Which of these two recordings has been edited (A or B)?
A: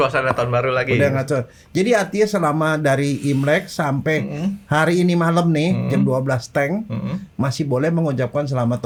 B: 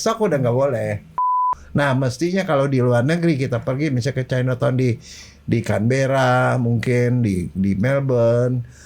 B